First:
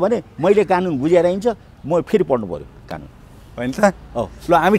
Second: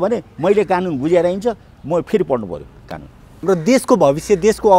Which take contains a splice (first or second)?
second